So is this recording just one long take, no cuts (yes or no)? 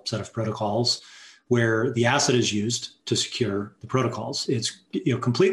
no